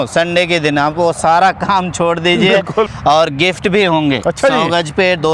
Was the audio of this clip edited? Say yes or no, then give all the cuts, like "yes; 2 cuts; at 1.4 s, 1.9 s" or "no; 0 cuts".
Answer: yes; 1 cut; at 2.9 s